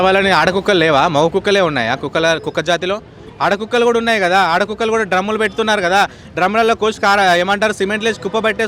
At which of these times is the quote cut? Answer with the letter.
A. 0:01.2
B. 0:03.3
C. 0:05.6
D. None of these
D